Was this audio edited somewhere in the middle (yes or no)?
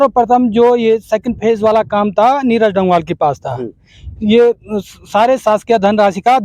no